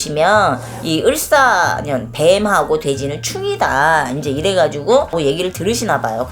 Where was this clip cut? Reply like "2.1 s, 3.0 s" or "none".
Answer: 5.1 s